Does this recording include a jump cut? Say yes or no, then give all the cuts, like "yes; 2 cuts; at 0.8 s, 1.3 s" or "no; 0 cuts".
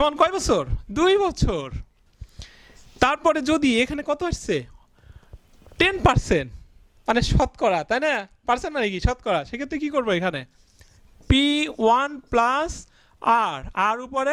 no; 0 cuts